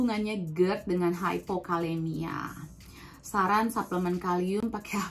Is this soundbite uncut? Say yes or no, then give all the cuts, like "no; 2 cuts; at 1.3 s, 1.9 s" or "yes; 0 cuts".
yes; 0 cuts